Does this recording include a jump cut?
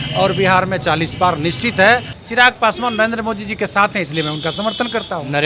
yes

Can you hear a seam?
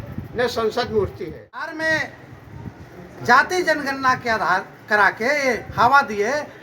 yes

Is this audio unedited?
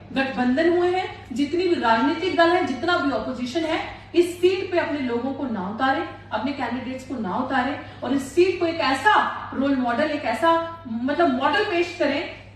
yes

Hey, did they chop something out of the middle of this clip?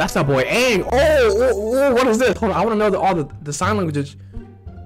no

